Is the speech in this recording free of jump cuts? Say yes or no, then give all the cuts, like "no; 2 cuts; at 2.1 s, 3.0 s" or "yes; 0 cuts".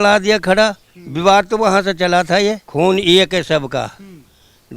no; 1 cut; at 2.6 s